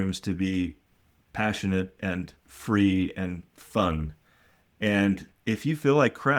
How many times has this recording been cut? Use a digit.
0